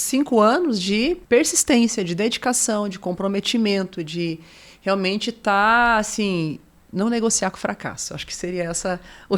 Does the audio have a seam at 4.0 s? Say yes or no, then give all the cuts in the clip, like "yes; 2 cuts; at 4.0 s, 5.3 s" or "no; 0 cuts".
no; 0 cuts